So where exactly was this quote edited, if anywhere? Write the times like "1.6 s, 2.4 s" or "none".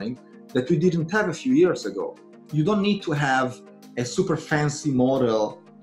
2.4 s

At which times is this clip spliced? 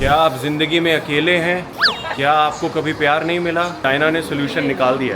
2.1 s, 3.8 s

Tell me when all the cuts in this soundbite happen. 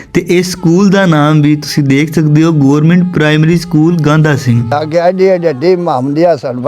4.7 s

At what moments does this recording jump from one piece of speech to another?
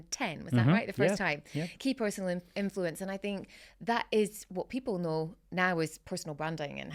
none

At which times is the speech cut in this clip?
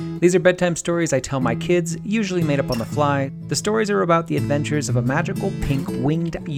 3.4 s

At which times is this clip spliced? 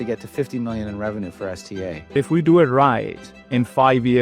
2.1 s

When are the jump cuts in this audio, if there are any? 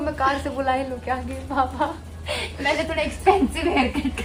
none

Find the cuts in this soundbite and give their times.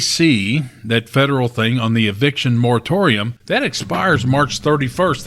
3.3 s

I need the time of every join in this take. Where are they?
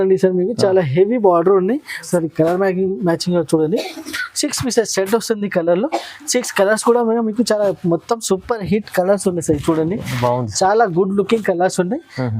2.0 s

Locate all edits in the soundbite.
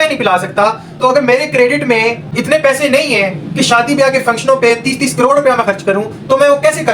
2.3 s

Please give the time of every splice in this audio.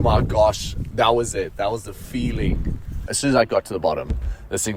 0.8 s, 3.1 s

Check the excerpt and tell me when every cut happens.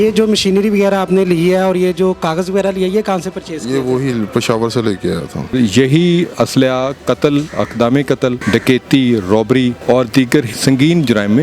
5.5 s, 8.4 s, 9.8 s, 10.5 s

